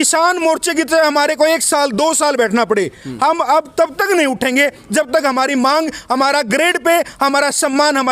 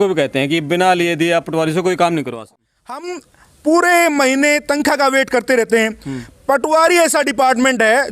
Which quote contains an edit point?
second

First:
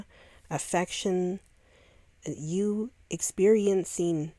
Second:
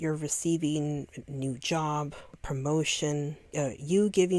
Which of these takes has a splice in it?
second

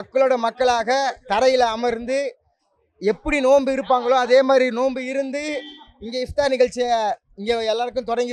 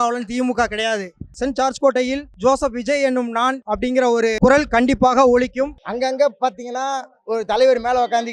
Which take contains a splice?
second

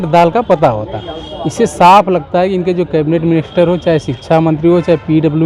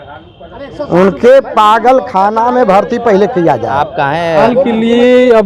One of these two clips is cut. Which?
second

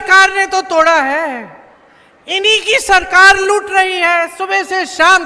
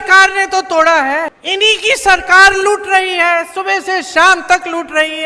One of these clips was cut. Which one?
second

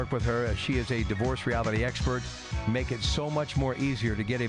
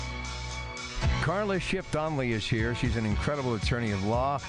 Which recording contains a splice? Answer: second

